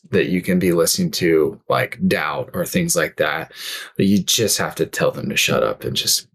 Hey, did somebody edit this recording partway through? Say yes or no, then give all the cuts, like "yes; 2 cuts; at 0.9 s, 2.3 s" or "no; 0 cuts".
no; 0 cuts